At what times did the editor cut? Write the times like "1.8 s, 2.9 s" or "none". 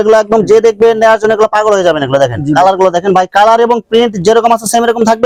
none